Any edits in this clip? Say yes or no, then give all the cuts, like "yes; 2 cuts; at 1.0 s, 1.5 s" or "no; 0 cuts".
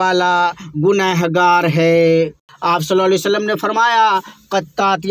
yes; 1 cut; at 2.5 s